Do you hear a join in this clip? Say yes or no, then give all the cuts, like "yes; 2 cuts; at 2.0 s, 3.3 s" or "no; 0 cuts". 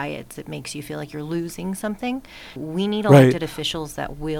yes; 1 cut; at 2.6 s